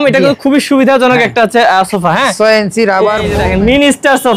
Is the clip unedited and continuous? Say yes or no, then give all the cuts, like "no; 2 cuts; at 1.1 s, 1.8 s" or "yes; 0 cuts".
no; 1 cut; at 3.3 s